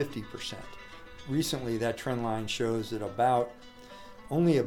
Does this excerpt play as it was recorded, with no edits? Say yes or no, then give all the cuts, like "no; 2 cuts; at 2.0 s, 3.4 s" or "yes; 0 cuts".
no; 1 cut; at 1.1 s